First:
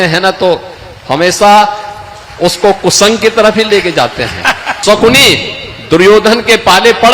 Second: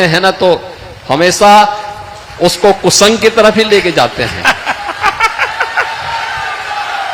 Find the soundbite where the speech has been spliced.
first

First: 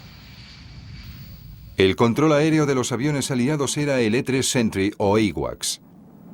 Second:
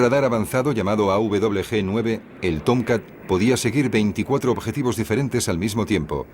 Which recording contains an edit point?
second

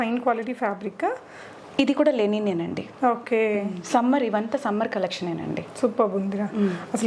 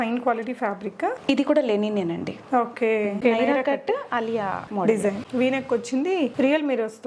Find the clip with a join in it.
second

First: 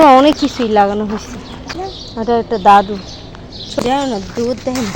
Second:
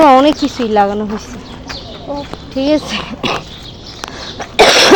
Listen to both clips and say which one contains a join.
first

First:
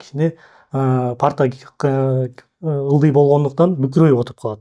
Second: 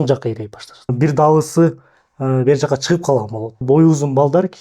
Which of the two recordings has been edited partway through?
second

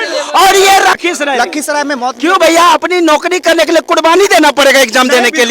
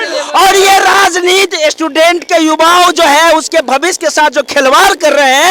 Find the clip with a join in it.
first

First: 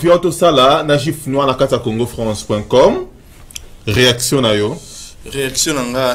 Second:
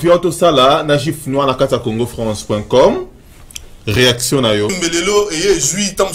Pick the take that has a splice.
second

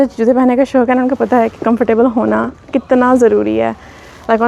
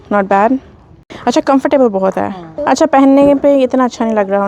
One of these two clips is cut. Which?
second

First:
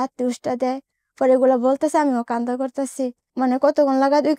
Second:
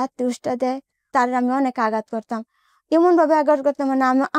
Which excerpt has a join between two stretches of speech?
second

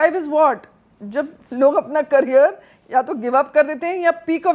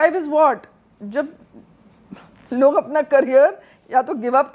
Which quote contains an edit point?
first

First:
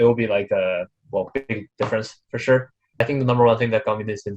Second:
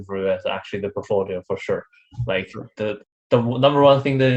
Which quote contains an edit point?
first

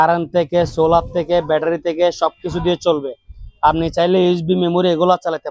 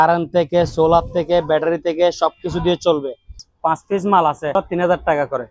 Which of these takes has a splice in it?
second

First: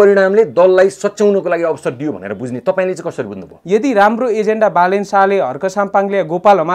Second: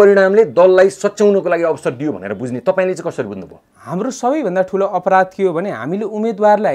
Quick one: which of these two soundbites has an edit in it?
first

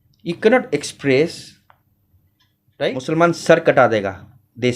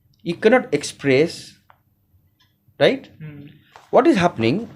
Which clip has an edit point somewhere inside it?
first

